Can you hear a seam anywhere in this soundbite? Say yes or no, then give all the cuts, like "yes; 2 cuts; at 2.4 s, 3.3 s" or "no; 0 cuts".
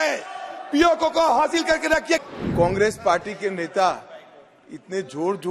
yes; 1 cut; at 2.2 s